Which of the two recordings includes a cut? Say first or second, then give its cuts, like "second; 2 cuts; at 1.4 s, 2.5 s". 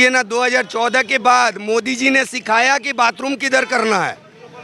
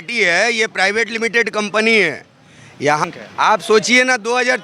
second; 1 cut; at 3.0 s